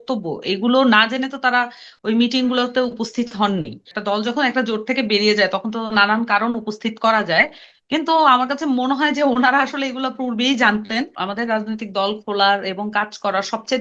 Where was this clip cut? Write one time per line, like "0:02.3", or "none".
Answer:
0:03.9
0:11.2